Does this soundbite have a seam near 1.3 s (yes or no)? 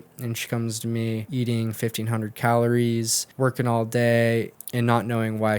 yes